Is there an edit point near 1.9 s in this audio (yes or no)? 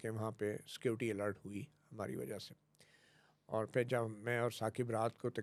no